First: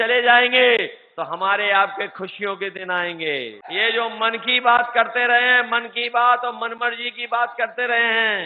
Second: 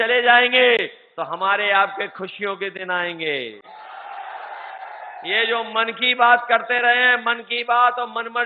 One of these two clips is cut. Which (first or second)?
first